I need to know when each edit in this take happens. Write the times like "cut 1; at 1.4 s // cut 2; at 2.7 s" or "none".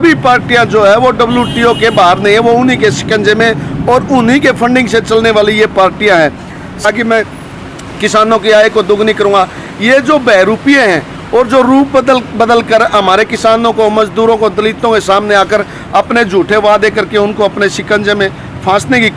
cut 1; at 6.8 s